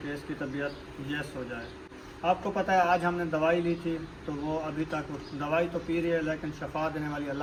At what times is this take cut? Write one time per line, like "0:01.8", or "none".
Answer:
none